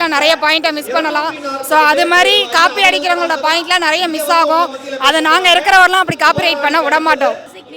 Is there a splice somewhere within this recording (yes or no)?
no